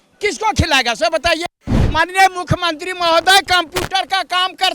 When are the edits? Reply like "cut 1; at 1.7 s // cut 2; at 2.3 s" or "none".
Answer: cut 1; at 1.8 s